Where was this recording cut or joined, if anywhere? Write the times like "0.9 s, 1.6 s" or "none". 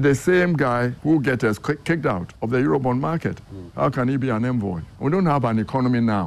0.9 s, 2.3 s, 4.9 s

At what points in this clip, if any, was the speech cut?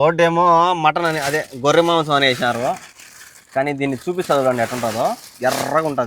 none

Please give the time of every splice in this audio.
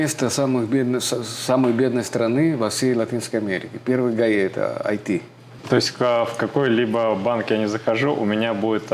5.6 s

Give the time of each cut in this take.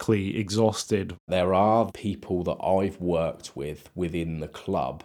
1.2 s, 1.9 s

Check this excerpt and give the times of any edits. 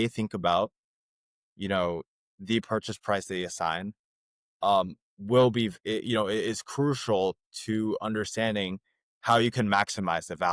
none

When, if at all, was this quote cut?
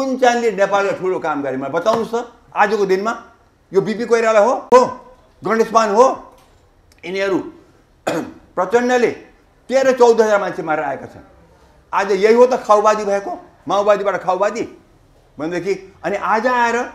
none

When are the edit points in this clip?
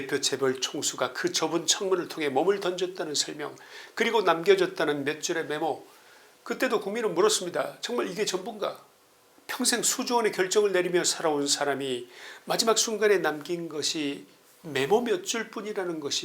none

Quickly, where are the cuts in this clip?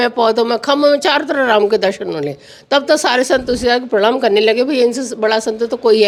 none

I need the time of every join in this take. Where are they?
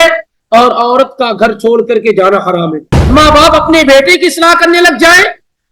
2.9 s

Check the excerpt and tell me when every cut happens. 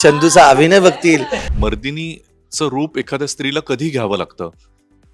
1.4 s

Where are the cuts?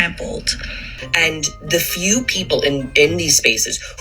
1.0 s

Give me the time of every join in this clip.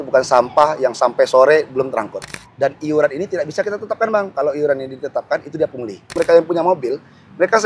2.2 s, 6.1 s

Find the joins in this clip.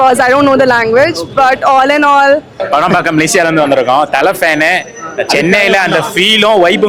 2.6 s

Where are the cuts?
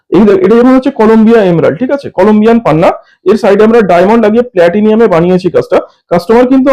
none

